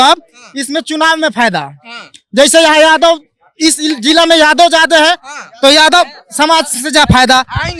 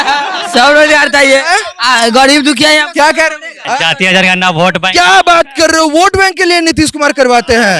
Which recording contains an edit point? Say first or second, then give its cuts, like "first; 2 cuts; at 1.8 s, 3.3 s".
second; 1 cut; at 3.6 s